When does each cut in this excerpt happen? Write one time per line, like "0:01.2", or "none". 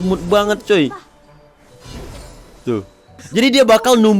0:03.2